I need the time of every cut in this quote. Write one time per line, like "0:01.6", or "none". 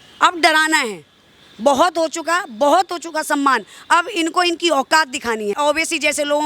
0:05.5